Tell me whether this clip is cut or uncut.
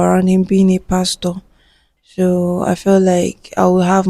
uncut